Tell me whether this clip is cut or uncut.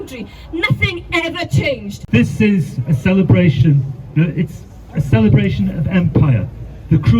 cut